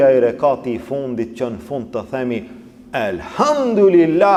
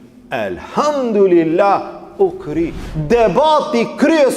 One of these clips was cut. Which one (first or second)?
second